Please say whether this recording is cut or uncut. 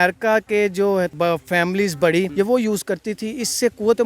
cut